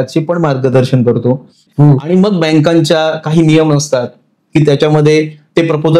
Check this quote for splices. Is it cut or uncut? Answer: cut